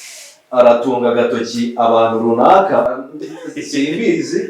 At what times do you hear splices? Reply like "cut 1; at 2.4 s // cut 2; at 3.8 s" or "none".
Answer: cut 1; at 2.9 s